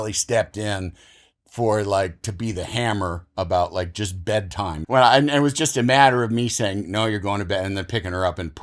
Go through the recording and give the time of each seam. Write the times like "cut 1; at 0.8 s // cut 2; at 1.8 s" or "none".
cut 1; at 4.7 s